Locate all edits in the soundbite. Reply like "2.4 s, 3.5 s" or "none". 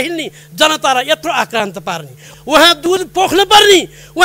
2.3 s